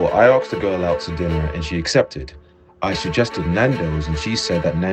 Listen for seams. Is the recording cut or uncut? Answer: uncut